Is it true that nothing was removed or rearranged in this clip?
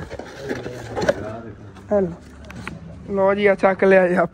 yes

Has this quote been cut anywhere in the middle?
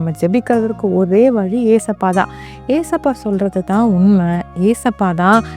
yes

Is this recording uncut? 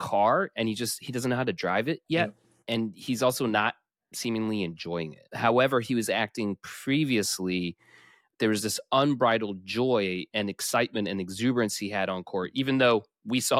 no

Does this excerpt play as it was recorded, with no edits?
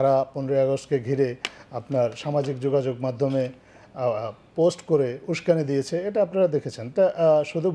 yes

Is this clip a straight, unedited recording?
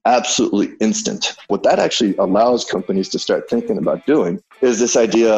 no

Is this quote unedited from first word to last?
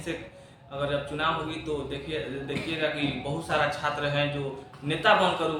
yes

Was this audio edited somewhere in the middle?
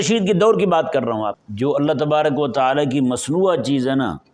yes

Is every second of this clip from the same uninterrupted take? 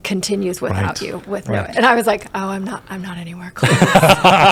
yes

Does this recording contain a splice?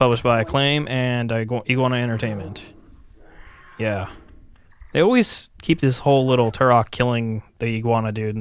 yes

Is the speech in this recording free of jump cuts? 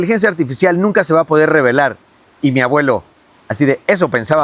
yes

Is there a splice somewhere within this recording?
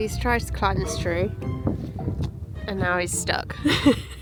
no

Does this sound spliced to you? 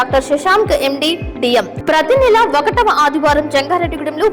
yes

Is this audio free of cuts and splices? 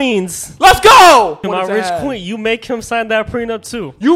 no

